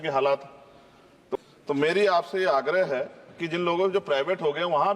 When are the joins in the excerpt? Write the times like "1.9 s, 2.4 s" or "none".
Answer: 1.4 s